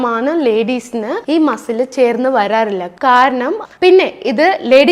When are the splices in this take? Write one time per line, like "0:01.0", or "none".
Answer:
0:03.6